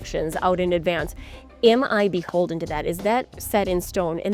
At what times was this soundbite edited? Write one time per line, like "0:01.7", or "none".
none